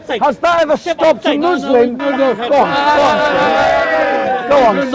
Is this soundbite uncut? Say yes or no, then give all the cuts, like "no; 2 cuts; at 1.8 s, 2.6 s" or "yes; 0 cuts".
yes; 0 cuts